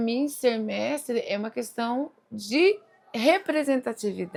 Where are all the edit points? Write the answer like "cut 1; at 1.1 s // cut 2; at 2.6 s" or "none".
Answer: none